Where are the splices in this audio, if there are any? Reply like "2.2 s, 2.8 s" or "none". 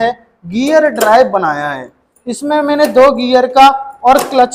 none